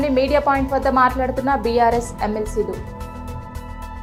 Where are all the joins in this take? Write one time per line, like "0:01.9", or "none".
none